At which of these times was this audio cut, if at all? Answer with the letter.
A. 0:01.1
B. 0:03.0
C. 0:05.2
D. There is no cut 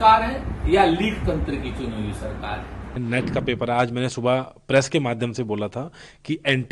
B